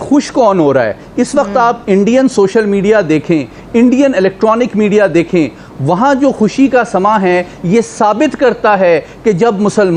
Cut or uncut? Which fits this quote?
uncut